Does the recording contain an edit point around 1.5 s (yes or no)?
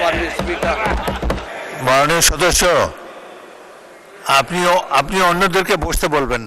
yes